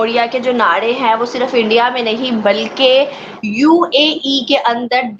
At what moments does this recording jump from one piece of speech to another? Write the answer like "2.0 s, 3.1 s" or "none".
none